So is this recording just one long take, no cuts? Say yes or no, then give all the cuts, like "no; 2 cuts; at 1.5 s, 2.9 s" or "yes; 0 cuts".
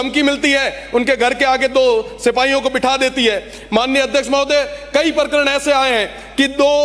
yes; 0 cuts